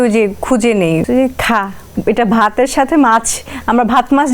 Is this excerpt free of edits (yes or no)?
no